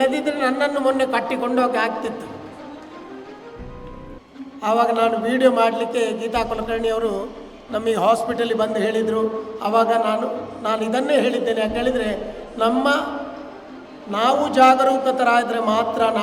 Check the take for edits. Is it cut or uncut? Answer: uncut